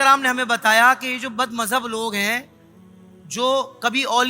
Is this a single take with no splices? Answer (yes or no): yes